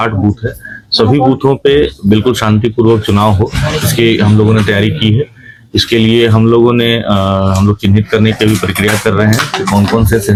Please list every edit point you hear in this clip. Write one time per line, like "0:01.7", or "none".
none